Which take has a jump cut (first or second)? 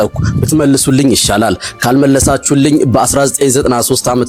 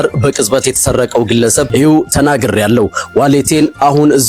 second